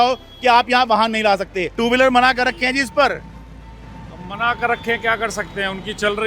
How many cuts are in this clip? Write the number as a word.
one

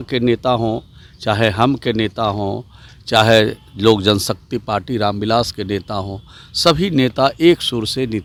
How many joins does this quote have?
zero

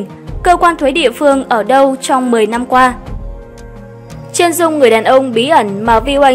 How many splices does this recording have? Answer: two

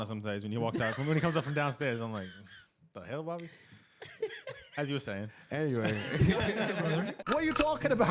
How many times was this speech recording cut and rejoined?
one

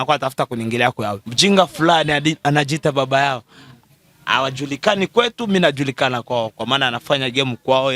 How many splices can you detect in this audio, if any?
one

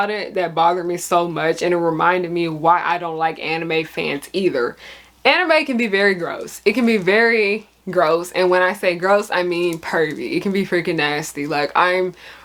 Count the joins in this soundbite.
zero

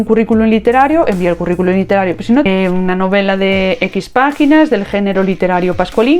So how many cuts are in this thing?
one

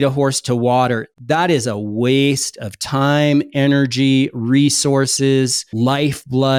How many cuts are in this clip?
zero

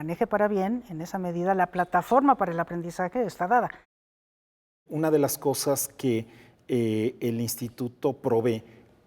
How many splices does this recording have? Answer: one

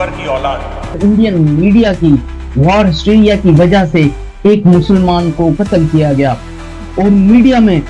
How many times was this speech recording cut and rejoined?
one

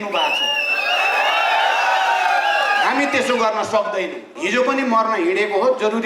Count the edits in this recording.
one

